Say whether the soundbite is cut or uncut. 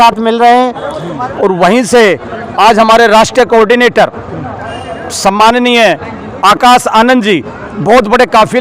cut